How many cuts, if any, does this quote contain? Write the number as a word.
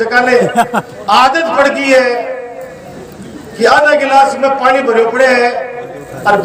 zero